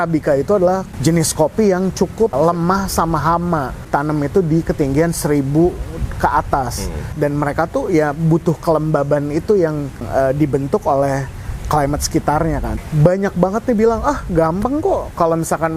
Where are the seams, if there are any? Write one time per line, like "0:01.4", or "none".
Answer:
0:00.9
0:02.3
0:03.9
0:07.1
0:12.8